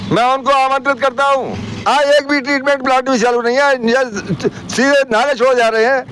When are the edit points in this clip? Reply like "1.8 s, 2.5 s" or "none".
1.7 s